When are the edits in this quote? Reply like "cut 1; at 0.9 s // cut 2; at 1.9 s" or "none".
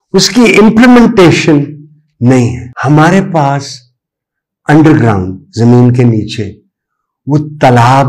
cut 1; at 2.7 s